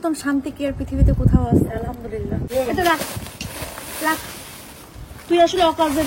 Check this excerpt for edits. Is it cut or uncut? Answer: cut